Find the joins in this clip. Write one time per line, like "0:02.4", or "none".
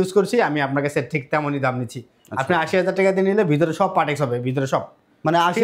none